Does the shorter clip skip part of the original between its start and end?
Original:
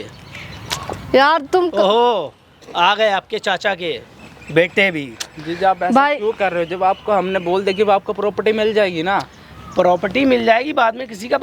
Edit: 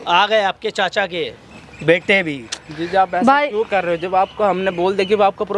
no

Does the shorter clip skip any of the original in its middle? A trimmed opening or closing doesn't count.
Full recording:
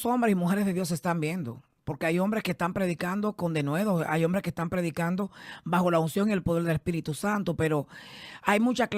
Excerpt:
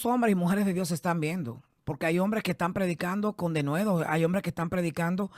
no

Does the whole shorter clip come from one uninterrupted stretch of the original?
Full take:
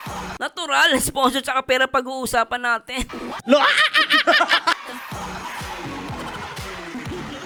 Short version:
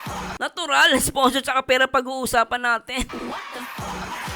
no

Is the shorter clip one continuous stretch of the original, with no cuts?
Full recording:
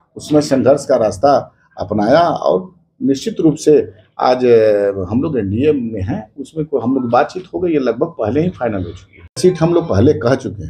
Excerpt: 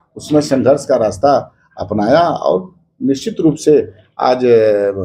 yes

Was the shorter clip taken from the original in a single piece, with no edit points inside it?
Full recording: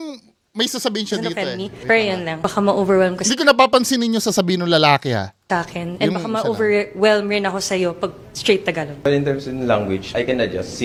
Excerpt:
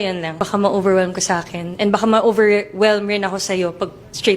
no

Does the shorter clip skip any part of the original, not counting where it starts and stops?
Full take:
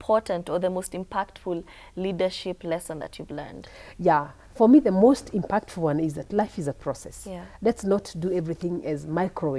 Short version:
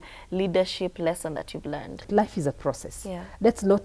yes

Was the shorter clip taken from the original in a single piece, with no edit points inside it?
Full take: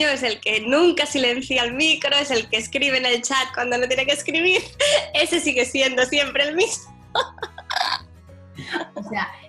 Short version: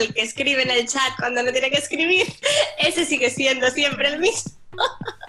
yes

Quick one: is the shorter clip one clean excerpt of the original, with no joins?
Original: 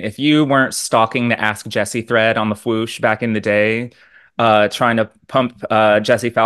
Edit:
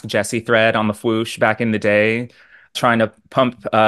no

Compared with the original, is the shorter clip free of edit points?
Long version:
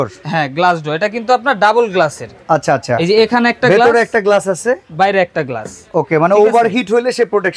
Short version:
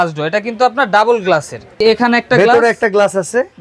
no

